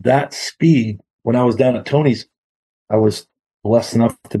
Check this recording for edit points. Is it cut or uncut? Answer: cut